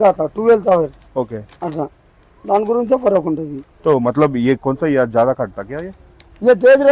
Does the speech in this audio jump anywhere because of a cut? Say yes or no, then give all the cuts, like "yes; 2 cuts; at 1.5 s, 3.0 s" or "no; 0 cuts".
no; 0 cuts